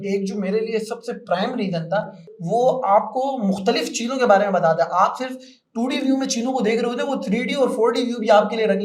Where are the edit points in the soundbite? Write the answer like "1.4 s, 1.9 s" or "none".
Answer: 2.3 s